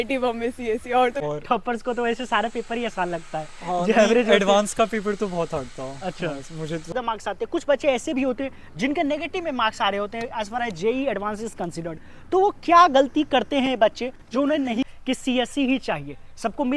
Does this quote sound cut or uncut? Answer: cut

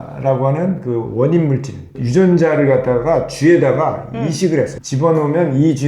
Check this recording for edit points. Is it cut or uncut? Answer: cut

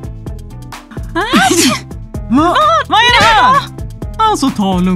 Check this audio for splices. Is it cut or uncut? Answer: cut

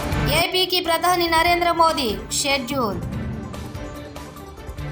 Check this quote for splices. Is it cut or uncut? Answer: uncut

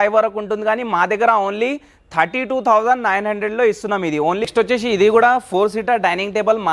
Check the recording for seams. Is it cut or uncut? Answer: cut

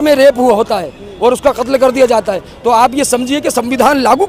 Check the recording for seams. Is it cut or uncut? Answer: uncut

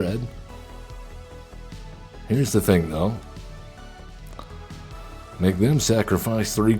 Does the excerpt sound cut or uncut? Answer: cut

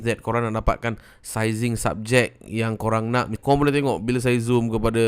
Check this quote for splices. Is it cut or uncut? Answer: cut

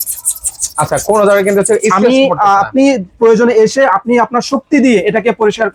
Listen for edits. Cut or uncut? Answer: uncut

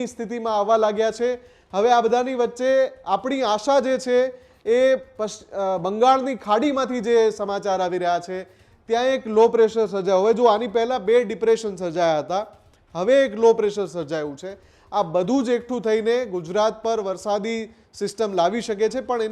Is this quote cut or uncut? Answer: uncut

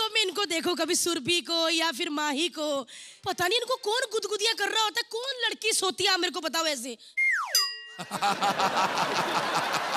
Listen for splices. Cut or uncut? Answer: uncut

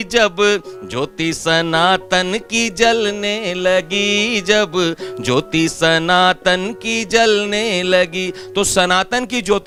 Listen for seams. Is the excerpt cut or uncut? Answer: uncut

